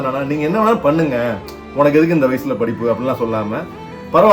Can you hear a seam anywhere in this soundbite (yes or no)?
yes